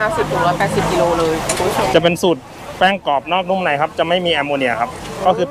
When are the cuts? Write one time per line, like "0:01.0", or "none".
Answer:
0:01.8